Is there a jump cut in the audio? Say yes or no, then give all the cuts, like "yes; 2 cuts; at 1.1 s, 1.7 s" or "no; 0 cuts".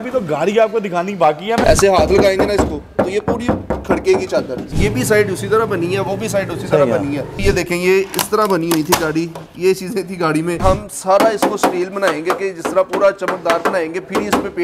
yes; 4 cuts; at 1.6 s, 4.6 s, 7.4 s, 10.6 s